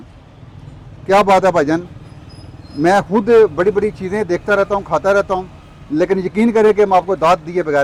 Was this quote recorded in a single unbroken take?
yes; 0 cuts

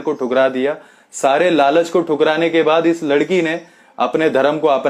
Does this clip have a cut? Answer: no; 0 cuts

